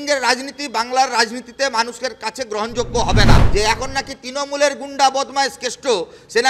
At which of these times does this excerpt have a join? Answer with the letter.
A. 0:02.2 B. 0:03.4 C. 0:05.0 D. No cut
B